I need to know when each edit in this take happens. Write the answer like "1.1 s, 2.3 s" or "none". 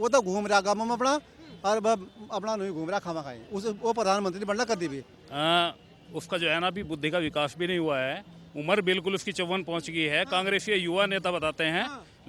5.1 s